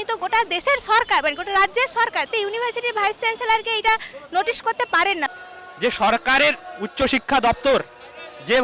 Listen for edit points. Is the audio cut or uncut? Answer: cut